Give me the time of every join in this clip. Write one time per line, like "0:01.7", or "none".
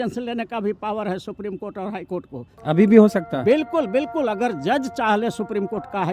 0:02.5